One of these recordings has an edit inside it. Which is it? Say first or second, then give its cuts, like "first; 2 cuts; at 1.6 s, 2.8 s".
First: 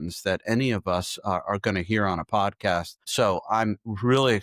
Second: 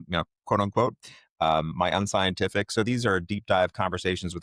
first; 1 cut; at 3.1 s